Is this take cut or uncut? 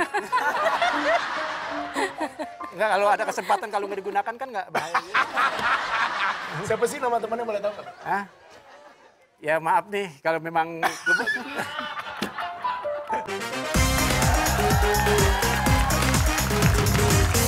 cut